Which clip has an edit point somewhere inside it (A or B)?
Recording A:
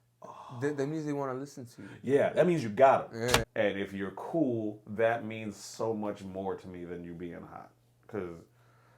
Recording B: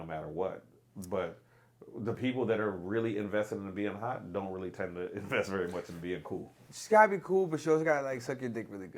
A